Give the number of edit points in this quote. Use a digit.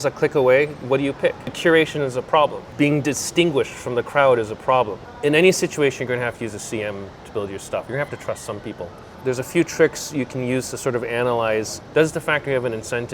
5